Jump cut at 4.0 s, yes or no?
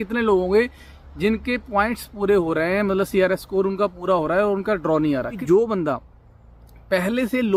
no